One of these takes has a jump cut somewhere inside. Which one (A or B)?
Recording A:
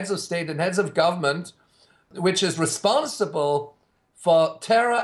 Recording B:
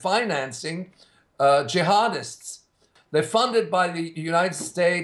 B